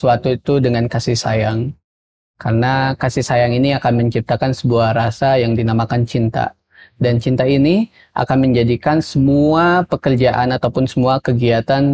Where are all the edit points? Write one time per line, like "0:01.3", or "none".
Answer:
none